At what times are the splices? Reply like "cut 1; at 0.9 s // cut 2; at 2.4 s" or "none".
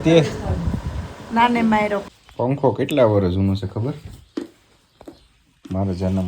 cut 1; at 2.1 s